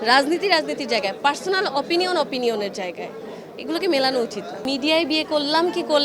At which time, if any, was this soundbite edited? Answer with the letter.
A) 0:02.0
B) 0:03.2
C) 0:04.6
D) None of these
C